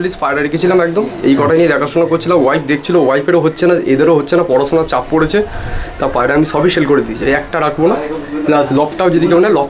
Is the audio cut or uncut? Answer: uncut